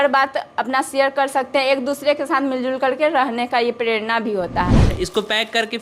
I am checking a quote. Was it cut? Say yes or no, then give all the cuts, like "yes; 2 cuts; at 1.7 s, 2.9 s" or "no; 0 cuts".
yes; 1 cut; at 4.8 s